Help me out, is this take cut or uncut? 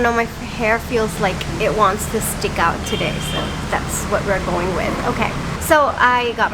uncut